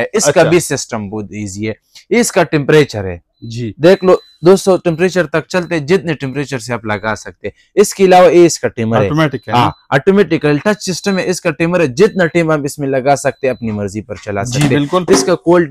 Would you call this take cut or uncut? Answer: uncut